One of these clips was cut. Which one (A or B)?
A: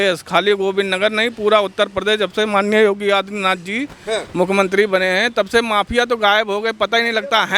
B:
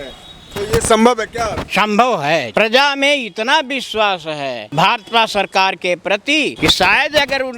B